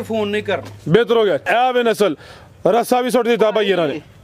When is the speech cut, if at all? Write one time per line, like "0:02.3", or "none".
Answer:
0:01.4